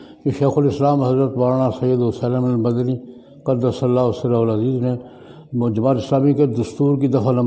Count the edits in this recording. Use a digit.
0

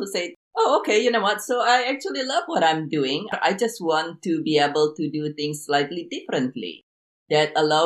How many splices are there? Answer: 1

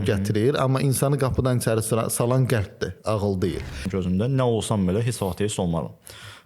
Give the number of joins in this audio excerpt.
1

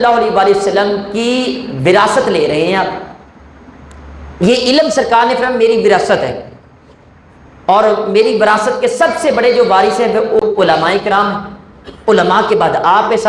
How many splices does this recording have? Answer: 1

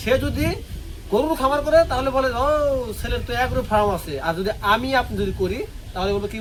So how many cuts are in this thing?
0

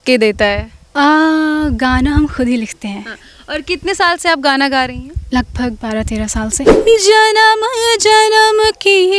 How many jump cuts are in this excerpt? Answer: 1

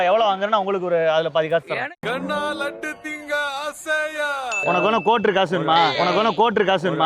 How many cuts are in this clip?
1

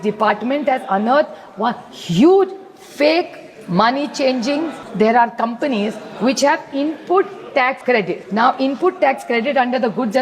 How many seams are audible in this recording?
2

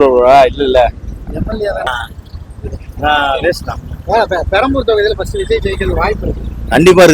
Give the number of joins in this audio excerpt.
1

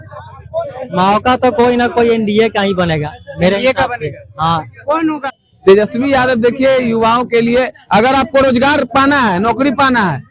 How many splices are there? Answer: 1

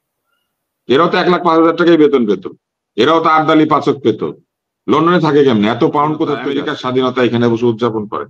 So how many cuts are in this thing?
1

